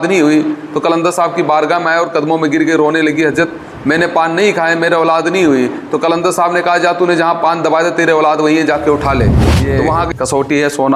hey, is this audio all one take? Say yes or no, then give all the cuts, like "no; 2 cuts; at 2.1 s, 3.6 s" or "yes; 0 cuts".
no; 1 cut; at 9.7 s